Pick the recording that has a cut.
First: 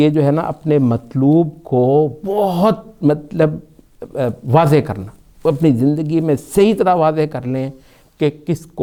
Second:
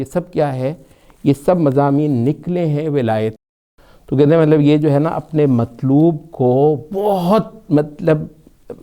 second; 1 cut; at 3.4 s

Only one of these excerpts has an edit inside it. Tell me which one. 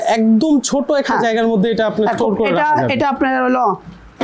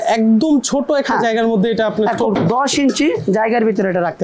second; 1 cut; at 2.3 s

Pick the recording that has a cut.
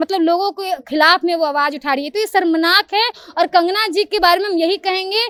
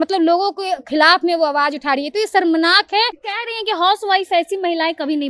second; 1 cut; at 3.2 s

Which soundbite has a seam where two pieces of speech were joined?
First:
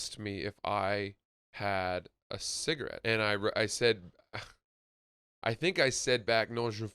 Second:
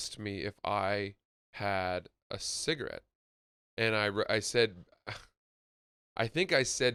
first; 1 cut; at 3.0 s

